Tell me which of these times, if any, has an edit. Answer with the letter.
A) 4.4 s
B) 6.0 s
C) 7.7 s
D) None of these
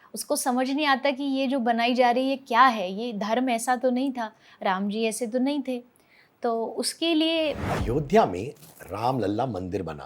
C